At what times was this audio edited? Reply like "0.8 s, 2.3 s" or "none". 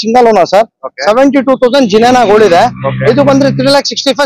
none

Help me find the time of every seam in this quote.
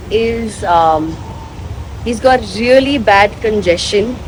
none

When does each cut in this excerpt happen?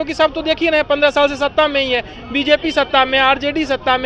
none

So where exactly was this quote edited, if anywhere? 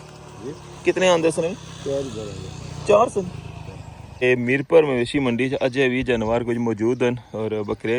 4.2 s

